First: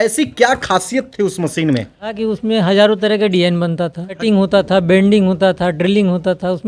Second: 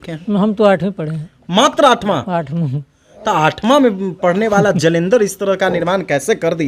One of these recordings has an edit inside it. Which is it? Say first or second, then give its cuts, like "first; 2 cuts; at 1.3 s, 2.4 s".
first; 2 cuts; at 2.1 s, 4.2 s